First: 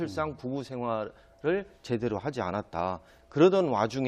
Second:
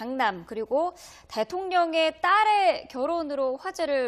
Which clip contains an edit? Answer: first; 1 cut; at 1.4 s

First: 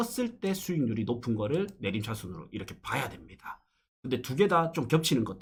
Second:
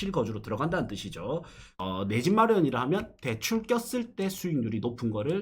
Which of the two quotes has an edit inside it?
second; 1 cut; at 1.6 s

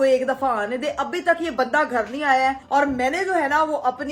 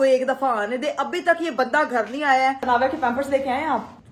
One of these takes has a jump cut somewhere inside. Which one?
second; 1 cut; at 2.7 s

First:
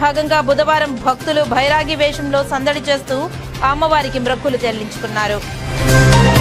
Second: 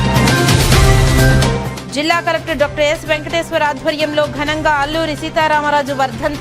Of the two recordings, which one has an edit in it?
second; 1 cut; at 1.6 s

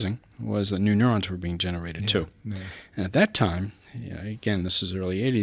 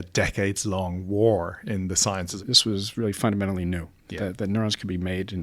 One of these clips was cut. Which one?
second; 1 cut; at 2.3 s

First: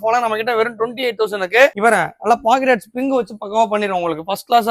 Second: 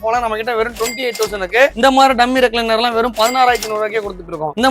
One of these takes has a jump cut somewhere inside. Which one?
second; 1 cut; at 1.7 s

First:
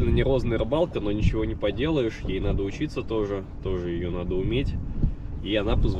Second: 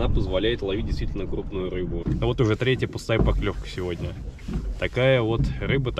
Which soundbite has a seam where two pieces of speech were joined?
second; 1 cut; at 2.0 s

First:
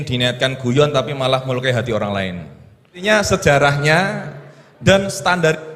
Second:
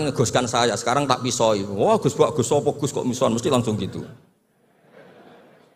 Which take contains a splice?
first; 1 cut; at 3.0 s

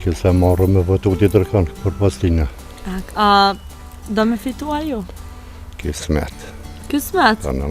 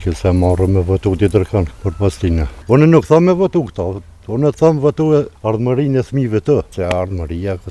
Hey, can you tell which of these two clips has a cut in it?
second; 3 cuts; at 2.5 s, 5.3 s, 6.7 s

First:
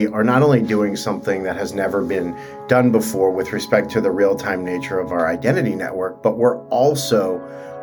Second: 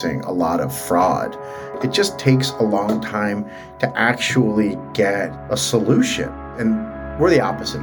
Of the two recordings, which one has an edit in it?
second; 3 cuts; at 1.8 s, 5.4 s, 6.5 s

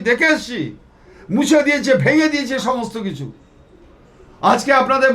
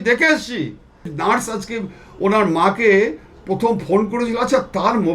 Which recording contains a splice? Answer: second; 1 cut; at 1.1 s

